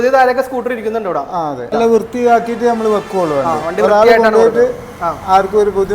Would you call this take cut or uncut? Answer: cut